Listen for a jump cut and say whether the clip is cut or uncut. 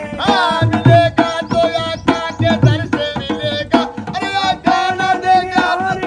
cut